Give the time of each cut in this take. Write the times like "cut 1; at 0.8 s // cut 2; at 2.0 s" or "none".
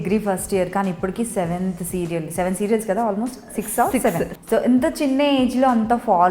cut 1; at 4.4 s